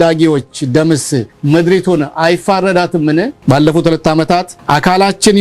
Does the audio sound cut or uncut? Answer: cut